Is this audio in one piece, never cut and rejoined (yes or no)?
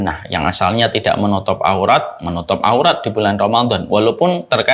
yes